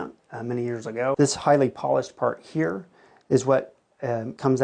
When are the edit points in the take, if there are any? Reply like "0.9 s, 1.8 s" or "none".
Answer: 1.2 s